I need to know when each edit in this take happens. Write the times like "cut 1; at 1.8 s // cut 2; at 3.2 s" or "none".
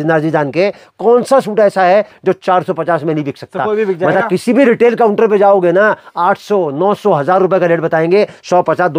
none